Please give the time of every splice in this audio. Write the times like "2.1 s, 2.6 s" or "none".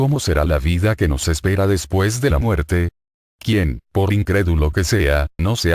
none